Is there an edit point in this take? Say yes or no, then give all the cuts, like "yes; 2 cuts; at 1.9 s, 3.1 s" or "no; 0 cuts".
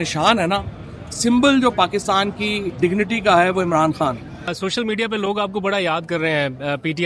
yes; 1 cut; at 4.6 s